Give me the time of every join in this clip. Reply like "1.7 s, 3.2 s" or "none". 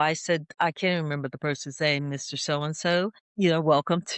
3.2 s